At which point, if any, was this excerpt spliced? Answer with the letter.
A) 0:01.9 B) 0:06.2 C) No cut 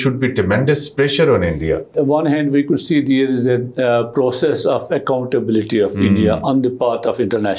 A